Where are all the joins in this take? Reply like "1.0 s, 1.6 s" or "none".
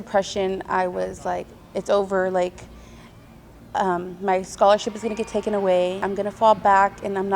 6.0 s